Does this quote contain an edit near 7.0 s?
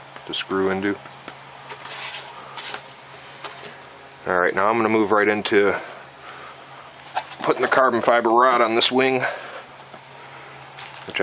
no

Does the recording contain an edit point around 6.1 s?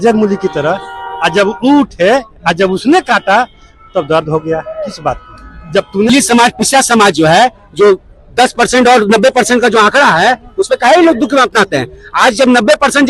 yes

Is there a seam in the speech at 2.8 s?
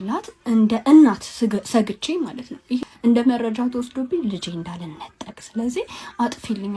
yes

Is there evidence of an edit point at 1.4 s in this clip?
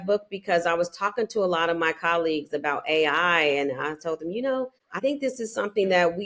no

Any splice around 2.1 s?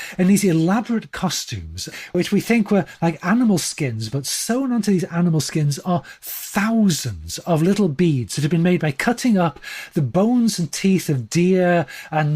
yes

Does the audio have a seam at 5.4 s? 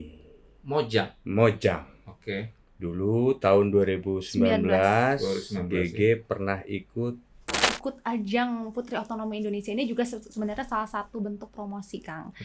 no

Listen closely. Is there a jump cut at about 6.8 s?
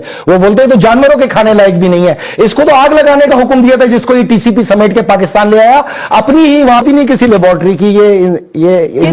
yes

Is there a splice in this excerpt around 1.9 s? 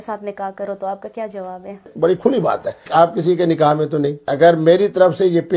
yes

